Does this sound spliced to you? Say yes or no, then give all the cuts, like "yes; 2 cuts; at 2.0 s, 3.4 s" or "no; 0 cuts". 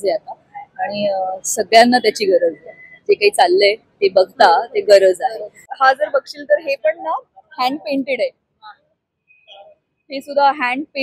yes; 1 cut; at 5.7 s